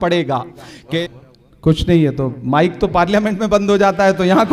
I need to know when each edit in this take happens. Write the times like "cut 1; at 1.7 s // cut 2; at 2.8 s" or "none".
cut 1; at 0.9 s